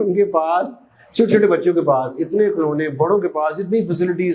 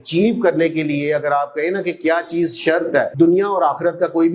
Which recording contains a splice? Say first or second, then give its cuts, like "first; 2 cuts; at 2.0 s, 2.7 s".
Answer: second; 1 cut; at 3.1 s